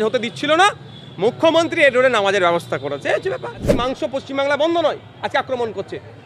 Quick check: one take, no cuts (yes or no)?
no